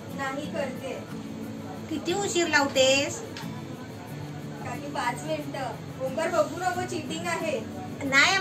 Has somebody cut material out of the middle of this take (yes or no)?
yes